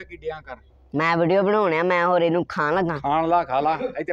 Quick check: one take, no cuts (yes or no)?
yes